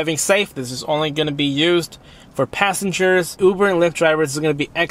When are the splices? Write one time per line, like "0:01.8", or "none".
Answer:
0:03.3